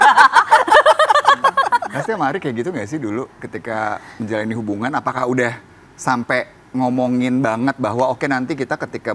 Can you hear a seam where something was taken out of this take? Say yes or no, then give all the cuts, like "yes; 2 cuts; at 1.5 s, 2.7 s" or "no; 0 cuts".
yes; 1 cut; at 1.9 s